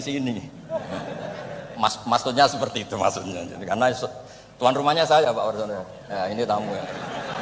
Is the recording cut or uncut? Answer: uncut